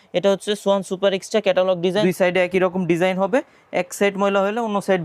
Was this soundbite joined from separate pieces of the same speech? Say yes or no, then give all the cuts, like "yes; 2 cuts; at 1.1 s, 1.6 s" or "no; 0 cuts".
yes; 1 cut; at 2.0 s